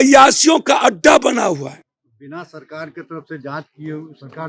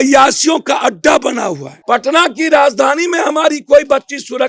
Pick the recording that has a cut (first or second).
second